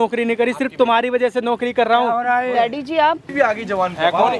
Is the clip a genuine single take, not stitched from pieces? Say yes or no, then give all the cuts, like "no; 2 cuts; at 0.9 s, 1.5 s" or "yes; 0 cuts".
no; 1 cut; at 3.3 s